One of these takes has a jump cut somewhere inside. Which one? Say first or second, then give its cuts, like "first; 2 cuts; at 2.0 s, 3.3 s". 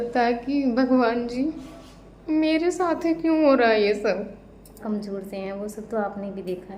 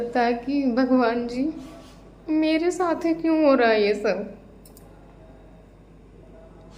first; 1 cut; at 4.8 s